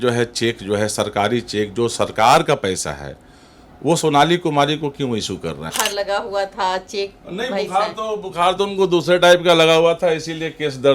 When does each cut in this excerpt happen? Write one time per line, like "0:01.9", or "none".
0:05.7

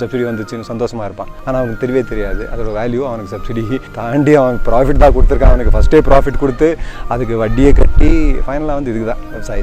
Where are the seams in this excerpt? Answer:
0:01.3
0:03.9

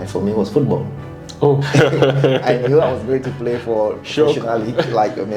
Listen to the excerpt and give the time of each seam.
0:01.6

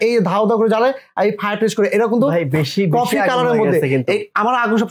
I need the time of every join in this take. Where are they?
none

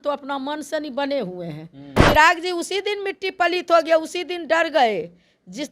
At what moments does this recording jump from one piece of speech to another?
0:02.0

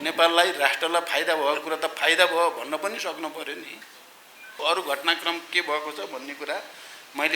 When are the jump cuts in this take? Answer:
0:04.6

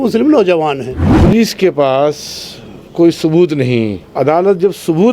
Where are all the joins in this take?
0:01.1
0:04.0

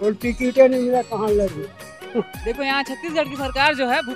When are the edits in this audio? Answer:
0:02.3

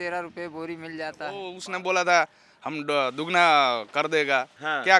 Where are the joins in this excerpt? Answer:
0:01.5

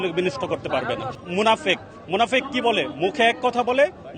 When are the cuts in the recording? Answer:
0:01.1

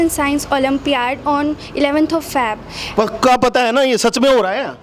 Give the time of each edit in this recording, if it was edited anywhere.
none

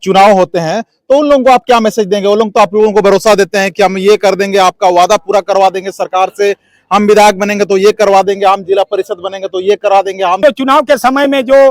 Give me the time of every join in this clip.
0:10.4

